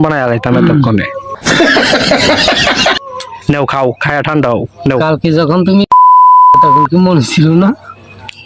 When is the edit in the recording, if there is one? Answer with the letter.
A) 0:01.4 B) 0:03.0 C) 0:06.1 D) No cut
D